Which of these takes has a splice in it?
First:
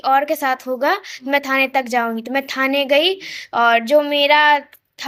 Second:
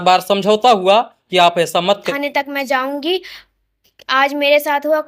second; 1 cut; at 2.1 s

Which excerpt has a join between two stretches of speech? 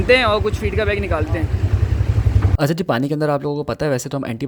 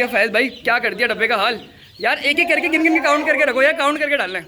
first; 1 cut; at 2.5 s

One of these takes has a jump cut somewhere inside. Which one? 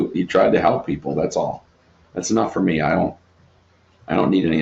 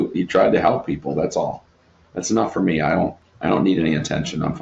second; 1 cut; at 3.3 s

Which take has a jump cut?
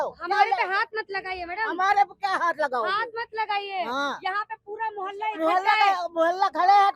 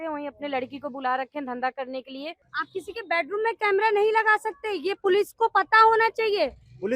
second; 1 cut; at 2.4 s

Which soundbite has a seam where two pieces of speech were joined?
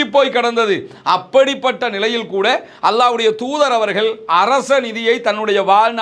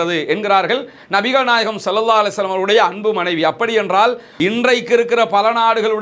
second; 1 cut; at 4.2 s

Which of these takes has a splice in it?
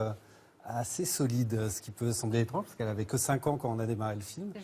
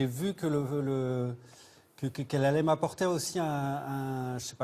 first; 1 cut; at 2.2 s

